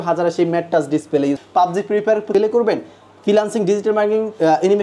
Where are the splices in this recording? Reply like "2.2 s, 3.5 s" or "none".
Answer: 1.4 s, 2.3 s

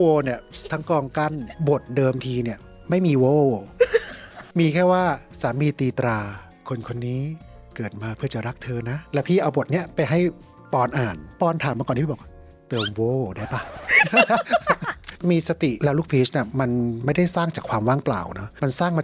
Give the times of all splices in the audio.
1.5 s, 9.0 s, 11.2 s, 15.1 s

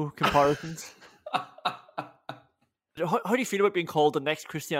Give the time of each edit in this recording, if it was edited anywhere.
2.9 s

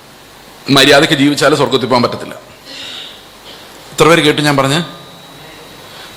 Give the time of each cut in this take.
none

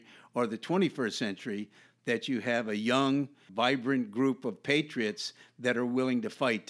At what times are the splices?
3.4 s

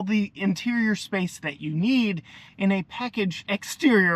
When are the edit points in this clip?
none

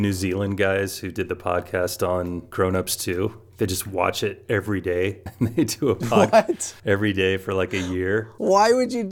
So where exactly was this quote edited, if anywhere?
2.4 s, 5.2 s, 6.7 s, 8.3 s

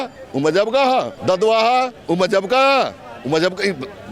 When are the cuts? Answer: 1.1 s

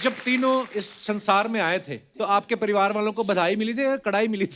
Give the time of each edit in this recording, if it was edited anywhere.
2.0 s

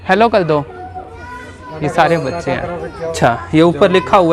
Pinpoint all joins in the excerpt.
3.1 s

